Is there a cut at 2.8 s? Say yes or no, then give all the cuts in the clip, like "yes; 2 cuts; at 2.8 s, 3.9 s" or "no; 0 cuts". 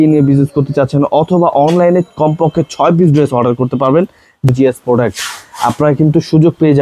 no; 1 cut; at 4.5 s